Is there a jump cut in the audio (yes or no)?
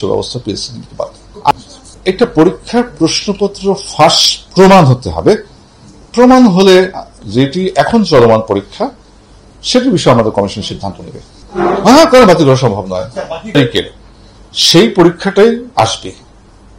yes